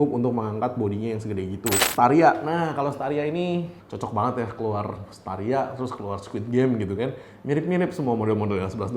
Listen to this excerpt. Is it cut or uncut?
cut